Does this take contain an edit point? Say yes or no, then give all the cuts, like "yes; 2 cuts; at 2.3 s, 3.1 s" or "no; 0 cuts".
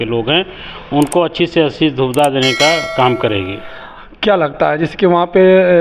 no; 0 cuts